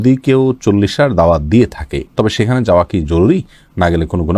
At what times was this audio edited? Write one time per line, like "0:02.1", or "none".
none